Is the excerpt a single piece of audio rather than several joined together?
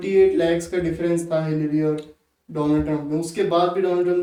yes; 0 cuts

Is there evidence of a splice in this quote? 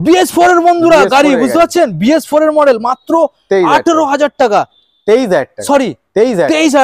no; 0 cuts

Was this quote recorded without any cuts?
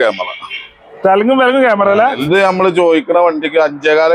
no; 1 cut; at 2.3 s

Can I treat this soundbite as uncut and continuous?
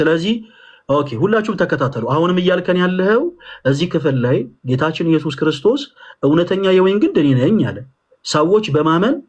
yes; 0 cuts

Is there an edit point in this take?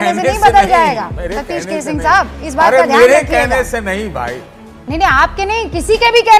no; 0 cuts

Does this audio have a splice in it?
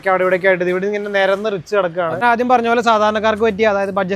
yes; 1 cut; at 2.2 s

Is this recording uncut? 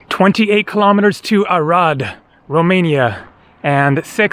yes; 0 cuts

